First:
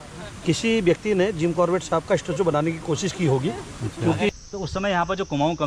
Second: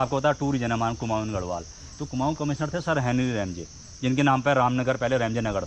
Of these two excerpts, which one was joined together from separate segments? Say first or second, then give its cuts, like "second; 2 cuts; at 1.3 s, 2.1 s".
first; 1 cut; at 4.3 s